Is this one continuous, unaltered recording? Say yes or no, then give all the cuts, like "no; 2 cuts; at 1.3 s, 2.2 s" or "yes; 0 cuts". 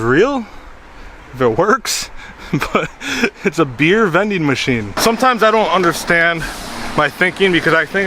no; 1 cut; at 4.9 s